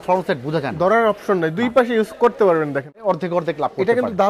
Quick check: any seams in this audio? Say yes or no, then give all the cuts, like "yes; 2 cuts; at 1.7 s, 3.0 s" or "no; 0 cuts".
yes; 1 cut; at 3.0 s